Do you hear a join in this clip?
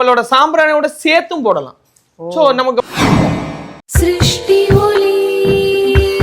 yes; 2 cuts; at 2.8 s, 3.7 s

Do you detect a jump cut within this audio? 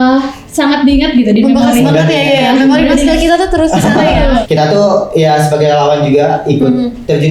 yes; 1 cut; at 4.4 s

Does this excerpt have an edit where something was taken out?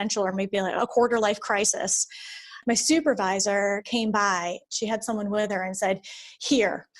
yes; 2 cuts; at 2.5 s, 4.6 s

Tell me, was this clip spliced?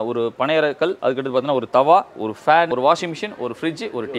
yes; 2 cuts; at 1.0 s, 2.7 s

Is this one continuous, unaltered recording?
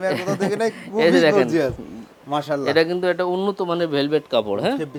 yes; 0 cuts

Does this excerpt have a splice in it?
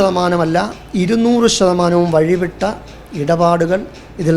no; 0 cuts

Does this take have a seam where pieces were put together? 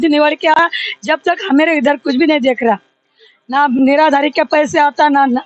no; 0 cuts

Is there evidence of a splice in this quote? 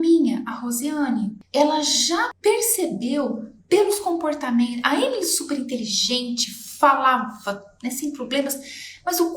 yes; 2 cuts; at 1.4 s, 2.3 s

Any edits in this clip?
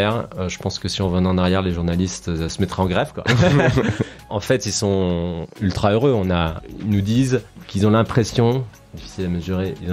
yes; 4 cuts; at 2.5 s, 4.3 s, 6.6 s, 7.6 s

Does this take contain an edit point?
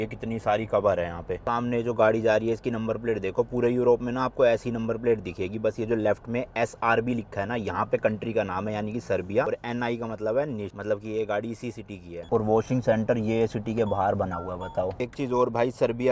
no; 0 cuts

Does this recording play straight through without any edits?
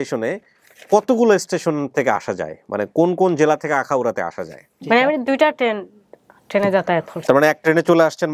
no; 2 cuts; at 4.8 s, 7.1 s

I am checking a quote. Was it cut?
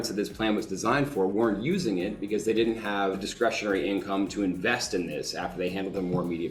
yes; 1 cut; at 3.2 s

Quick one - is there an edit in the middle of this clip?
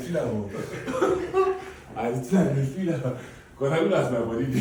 no; 0 cuts

